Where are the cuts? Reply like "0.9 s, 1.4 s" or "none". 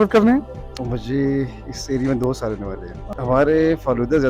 3.1 s